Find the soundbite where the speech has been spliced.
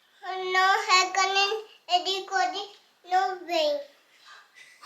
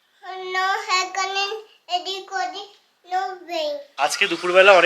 second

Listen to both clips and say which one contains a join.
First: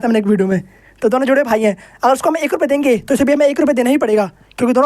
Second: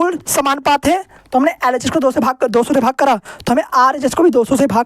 second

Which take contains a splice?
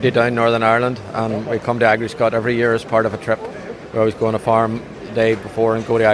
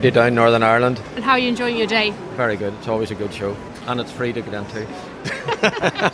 second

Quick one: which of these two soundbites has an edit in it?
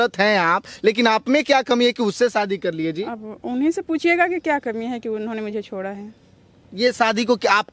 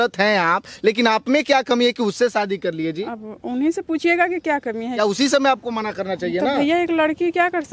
second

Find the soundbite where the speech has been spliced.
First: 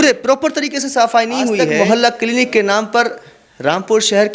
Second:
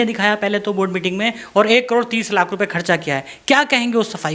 first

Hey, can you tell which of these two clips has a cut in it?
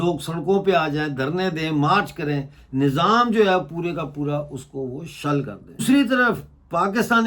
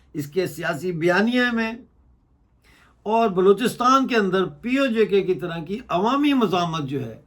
first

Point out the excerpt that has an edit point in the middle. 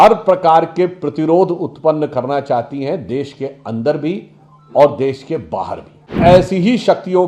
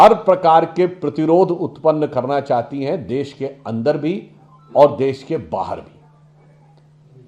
first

